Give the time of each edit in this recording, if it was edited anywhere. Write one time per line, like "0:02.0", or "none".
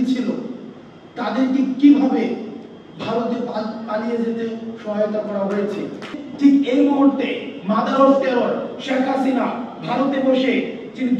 0:06.1

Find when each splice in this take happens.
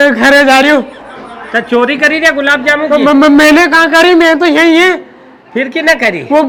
none

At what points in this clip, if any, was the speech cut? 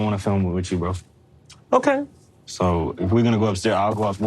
0:02.6

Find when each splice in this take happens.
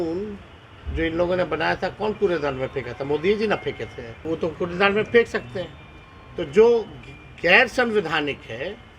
0:04.2

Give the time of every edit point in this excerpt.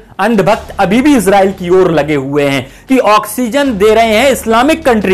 0:02.7

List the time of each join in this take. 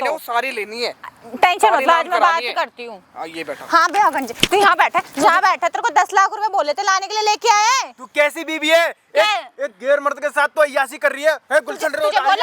none

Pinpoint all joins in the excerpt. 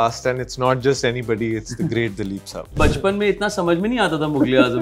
0:02.7

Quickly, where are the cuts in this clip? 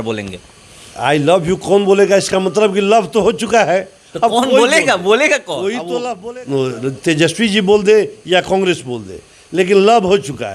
0:05.9

